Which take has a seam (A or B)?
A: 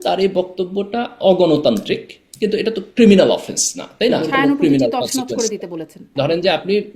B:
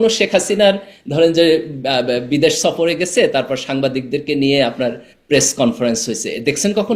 A